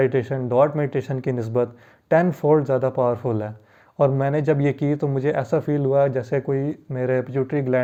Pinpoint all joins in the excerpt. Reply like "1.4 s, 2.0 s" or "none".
none